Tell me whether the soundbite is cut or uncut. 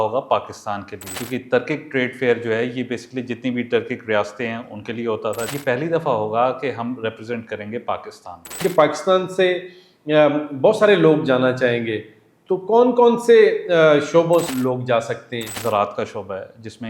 cut